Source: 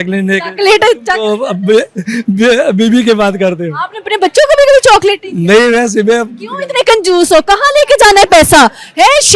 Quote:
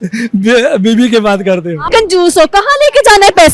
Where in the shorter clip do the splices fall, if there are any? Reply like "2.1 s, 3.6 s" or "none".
1.9 s